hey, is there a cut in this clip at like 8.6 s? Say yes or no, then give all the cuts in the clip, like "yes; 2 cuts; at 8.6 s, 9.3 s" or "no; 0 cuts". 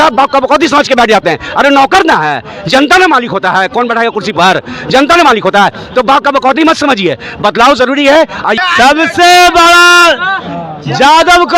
yes; 1 cut; at 8.6 s